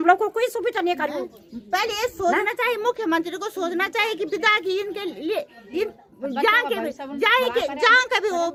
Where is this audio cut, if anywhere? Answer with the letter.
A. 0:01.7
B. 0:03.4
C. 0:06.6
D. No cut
D